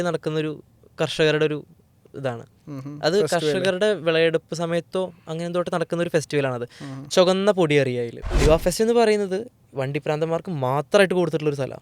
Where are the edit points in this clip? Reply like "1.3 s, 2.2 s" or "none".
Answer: 8.3 s